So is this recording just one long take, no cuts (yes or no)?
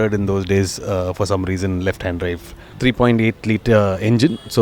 no